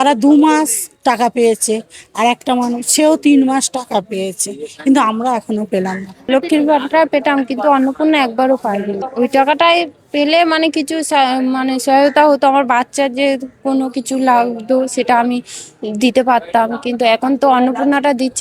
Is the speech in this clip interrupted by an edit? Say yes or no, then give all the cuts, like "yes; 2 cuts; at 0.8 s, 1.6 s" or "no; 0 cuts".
yes; 2 cuts; at 6.1 s, 9.0 s